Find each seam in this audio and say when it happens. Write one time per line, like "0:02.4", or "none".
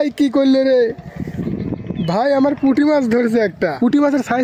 none